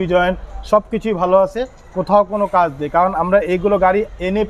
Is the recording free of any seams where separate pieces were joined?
yes; 0 cuts

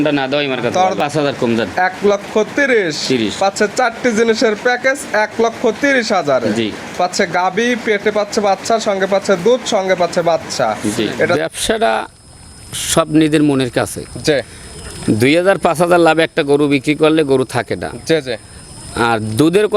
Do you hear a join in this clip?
yes; 2 cuts; at 1.0 s, 11.4 s

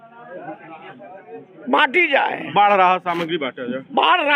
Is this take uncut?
yes; 0 cuts

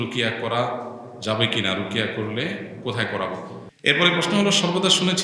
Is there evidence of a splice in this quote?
yes; 1 cut; at 3.6 s

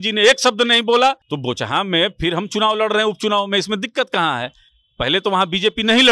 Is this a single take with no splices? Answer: no; 1 cut; at 1.3 s

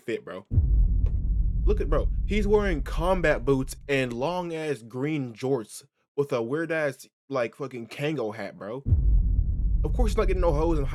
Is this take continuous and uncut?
yes; 0 cuts

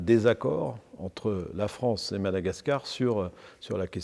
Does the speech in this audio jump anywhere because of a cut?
no; 0 cuts

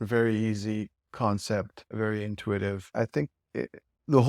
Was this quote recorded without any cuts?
no; 2 cuts; at 1.9 s, 2.9 s

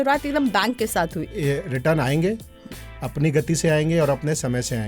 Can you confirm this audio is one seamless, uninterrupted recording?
no; 1 cut; at 1.3 s

